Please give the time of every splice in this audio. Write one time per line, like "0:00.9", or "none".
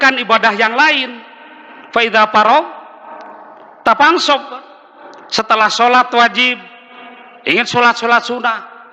none